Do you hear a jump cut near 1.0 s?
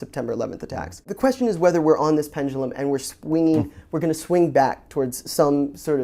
yes; 1 cut; at 1.0 s

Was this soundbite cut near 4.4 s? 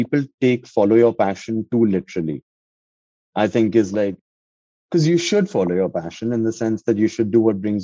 yes; 1 cut; at 4.4 s

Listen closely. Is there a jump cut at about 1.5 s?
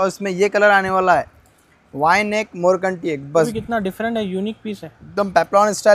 no; 1 cut; at 3.5 s

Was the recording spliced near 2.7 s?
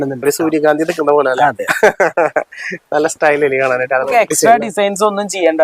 no; 1 cut; at 4.1 s

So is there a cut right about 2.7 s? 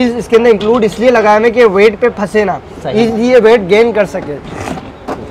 no; 0 cuts

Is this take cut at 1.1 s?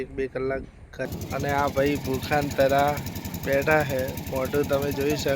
yes; 1 cut; at 1.1 s

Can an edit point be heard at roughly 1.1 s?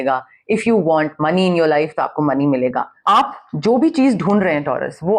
no; 1 cut; at 3.0 s

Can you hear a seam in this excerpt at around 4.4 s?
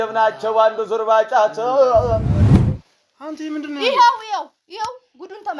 no; 1 cut; at 2.3 s

